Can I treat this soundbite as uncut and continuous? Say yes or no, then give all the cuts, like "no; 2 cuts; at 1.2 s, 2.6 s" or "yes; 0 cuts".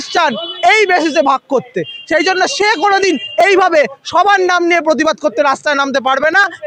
yes; 0 cuts